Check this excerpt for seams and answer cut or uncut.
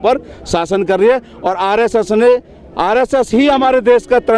uncut